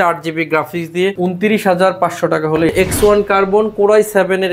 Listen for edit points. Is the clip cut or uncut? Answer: cut